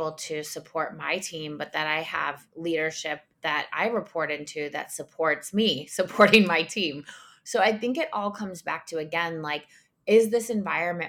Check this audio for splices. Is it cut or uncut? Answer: uncut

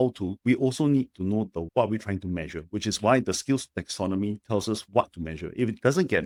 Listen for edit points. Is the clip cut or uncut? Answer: uncut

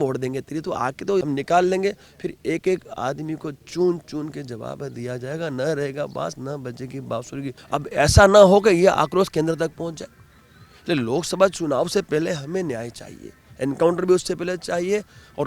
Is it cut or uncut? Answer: cut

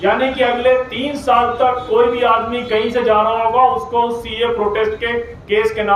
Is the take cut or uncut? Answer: uncut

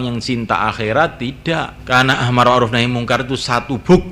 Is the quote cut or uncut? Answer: cut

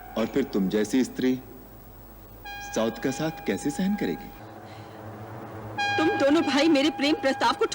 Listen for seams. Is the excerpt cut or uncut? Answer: cut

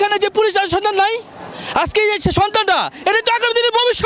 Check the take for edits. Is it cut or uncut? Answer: uncut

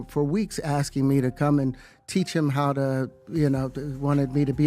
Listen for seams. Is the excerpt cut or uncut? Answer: uncut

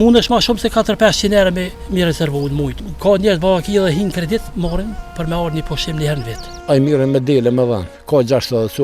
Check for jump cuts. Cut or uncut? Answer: cut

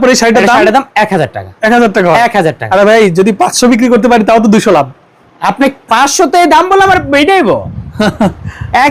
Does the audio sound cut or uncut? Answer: uncut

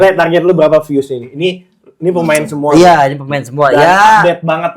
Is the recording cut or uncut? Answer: uncut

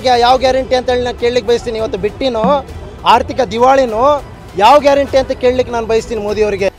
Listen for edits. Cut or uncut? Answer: uncut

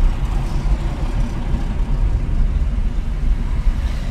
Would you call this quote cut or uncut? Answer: uncut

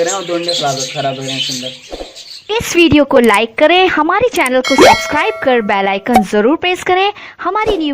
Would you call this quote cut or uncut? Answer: cut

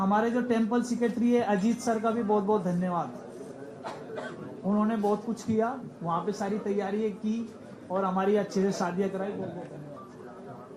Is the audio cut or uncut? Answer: uncut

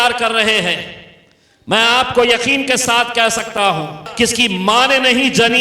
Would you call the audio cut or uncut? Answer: cut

